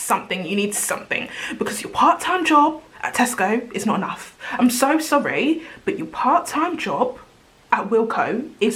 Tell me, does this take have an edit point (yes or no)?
no